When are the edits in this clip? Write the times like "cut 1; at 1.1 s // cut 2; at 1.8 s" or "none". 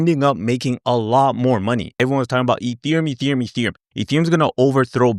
cut 1; at 1.9 s